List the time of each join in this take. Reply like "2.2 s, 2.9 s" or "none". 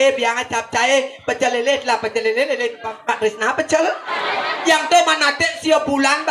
4.1 s